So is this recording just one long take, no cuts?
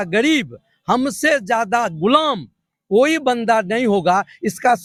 yes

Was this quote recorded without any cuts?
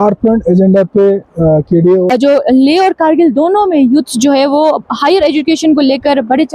no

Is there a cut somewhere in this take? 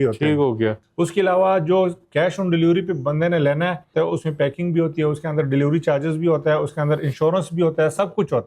yes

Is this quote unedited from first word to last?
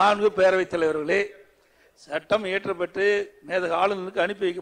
yes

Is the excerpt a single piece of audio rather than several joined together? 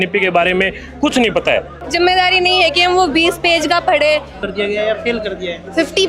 no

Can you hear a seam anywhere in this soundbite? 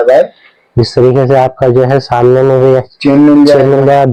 no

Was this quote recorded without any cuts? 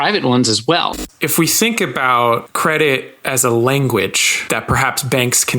no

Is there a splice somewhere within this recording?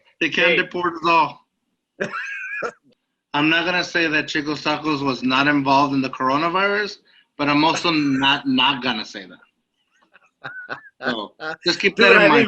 yes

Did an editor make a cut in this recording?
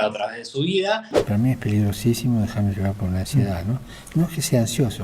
yes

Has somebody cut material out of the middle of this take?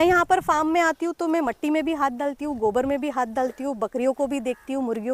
no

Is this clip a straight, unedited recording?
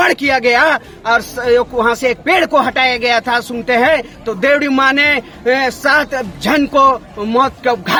yes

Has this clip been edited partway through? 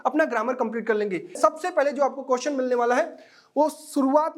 yes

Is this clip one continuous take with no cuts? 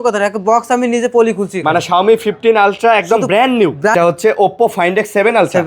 no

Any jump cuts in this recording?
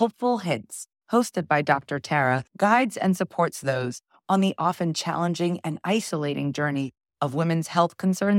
no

